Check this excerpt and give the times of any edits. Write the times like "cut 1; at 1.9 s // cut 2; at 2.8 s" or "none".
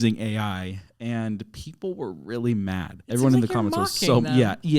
cut 1; at 2.9 s